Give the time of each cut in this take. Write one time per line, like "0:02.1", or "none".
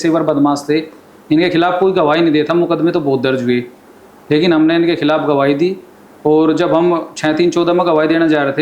none